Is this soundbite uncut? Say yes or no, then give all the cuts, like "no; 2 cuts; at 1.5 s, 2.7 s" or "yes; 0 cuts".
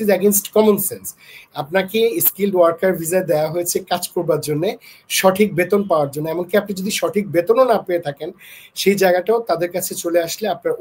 yes; 0 cuts